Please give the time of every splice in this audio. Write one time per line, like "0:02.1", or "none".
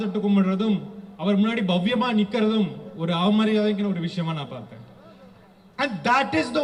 none